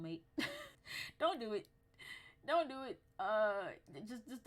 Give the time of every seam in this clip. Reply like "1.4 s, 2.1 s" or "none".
none